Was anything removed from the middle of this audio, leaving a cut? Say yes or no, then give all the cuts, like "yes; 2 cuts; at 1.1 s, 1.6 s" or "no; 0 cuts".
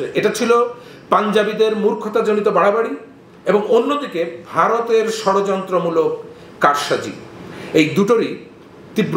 no; 0 cuts